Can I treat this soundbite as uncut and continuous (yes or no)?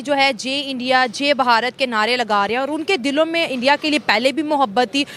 yes